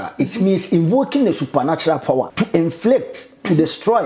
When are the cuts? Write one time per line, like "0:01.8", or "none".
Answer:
0:02.3